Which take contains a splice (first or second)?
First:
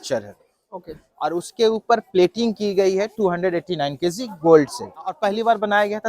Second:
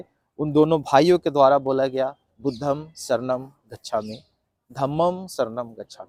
first